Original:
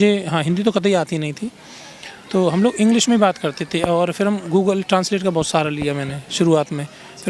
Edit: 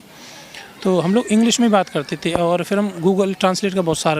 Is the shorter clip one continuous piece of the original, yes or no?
yes